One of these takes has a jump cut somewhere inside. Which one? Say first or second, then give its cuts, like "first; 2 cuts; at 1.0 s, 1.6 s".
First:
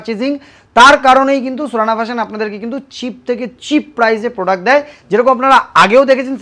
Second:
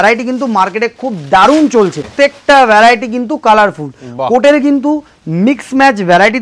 second; 1 cut; at 2.1 s